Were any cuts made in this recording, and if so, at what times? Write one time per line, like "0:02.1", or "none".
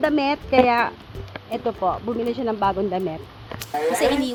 none